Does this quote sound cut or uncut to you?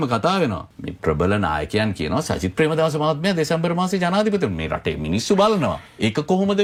uncut